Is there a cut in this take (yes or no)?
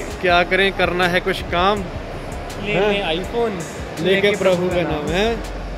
no